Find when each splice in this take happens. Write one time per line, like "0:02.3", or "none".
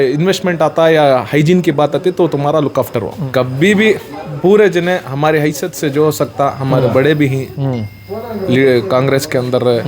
0:03.2